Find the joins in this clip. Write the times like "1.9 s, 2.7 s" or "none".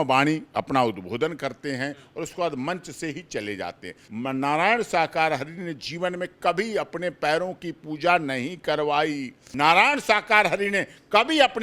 4.0 s, 9.6 s

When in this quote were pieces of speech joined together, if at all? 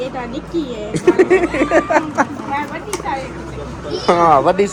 none

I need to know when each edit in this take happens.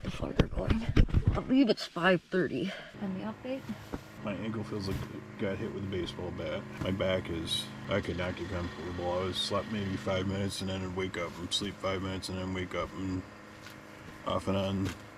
1.1 s, 2.9 s, 4.1 s, 6.7 s, 7.7 s

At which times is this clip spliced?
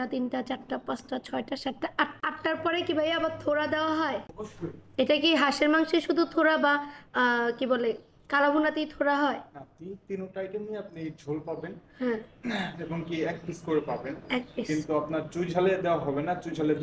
none

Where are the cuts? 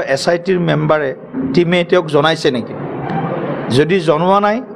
none

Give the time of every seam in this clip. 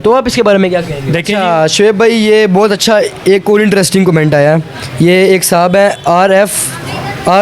1.3 s

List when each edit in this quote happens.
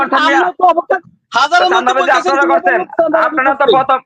1.0 s

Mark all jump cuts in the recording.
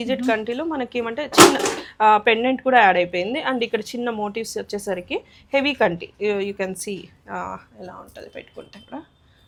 none

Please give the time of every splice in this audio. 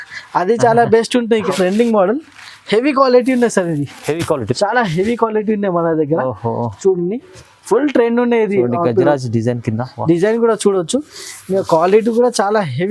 1.5 s

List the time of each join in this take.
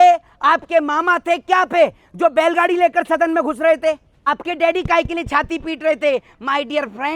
4.3 s

